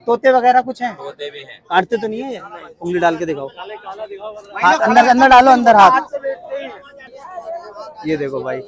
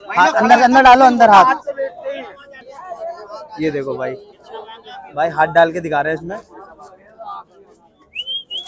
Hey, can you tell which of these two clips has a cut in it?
first; 1 cut; at 1.6 s

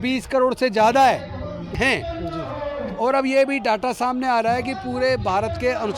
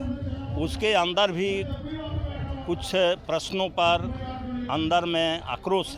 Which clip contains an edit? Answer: first; 1 cut; at 1.8 s

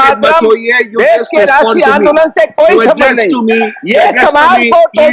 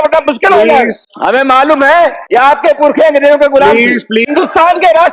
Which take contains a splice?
second; 3 cuts; at 1.0 s, 2.2 s, 4.3 s

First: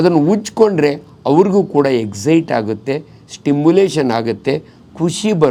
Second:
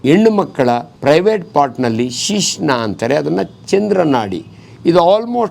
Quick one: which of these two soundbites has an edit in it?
second; 1 cut; at 0.9 s

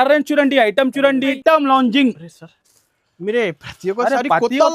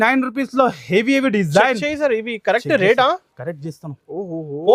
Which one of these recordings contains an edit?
first; 1 cut; at 1.4 s

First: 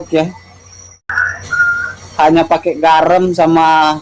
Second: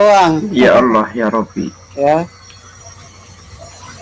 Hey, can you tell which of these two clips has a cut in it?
first; 1 cut; at 1.1 s

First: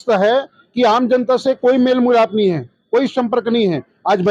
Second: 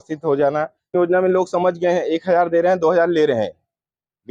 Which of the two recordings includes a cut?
second; 1 cut; at 1.0 s

